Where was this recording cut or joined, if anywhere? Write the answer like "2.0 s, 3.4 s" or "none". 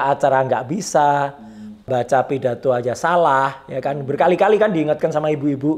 none

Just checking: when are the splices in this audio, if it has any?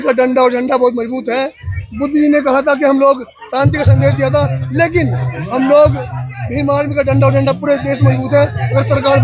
none

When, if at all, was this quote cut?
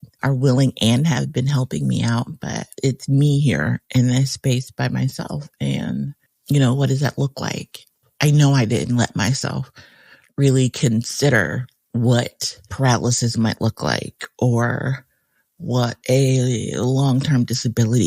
2.7 s, 8.0 s

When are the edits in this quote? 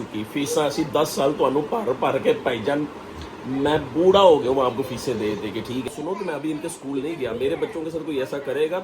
5.9 s

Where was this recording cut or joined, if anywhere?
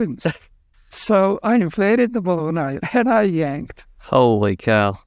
2.8 s

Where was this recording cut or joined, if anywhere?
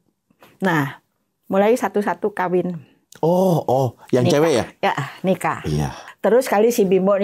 6.0 s

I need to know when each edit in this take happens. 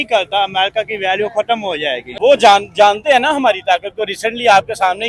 2.1 s

